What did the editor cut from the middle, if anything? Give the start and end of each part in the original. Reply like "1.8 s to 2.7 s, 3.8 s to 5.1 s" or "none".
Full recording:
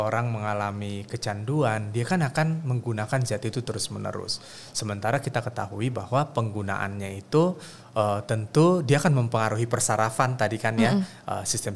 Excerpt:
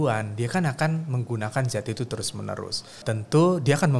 4.6 s to 8.2 s